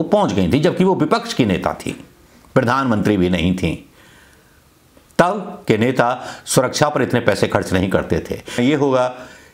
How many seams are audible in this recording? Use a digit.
1